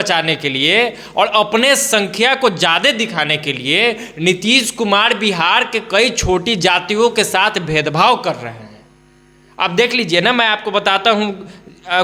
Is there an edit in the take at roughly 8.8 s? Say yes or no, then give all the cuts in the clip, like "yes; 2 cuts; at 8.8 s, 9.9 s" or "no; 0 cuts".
no; 0 cuts